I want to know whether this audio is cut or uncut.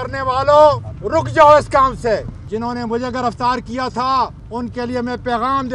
cut